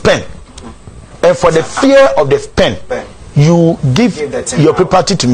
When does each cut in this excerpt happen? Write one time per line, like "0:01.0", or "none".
none